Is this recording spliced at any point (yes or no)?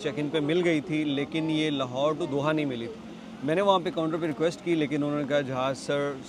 no